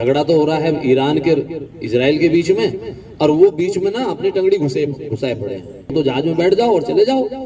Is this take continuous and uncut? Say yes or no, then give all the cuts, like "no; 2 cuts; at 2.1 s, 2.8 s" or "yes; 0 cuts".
no; 1 cut; at 5.9 s